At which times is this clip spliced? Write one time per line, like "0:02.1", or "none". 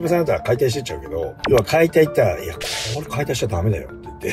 0:01.3